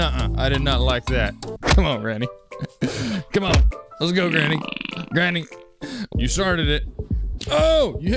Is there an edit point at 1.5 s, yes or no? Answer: yes